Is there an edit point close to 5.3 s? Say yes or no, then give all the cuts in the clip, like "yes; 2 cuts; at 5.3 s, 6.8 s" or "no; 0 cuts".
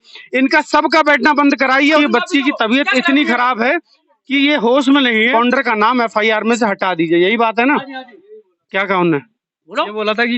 yes; 2 cuts; at 2.0 s, 5.3 s